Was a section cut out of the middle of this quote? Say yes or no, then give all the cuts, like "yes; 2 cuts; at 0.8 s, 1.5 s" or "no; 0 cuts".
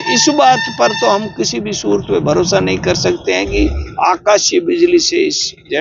no; 0 cuts